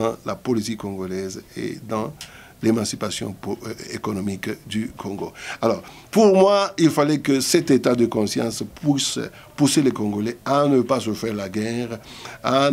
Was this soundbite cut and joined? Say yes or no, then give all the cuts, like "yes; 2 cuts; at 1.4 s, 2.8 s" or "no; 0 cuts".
no; 0 cuts